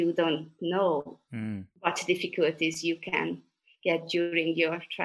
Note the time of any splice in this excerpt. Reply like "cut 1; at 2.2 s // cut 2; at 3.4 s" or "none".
cut 1; at 1.7 s